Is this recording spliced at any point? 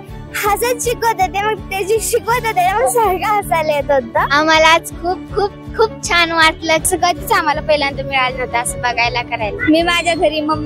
yes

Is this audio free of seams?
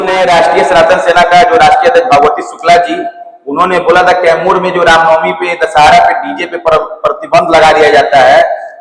yes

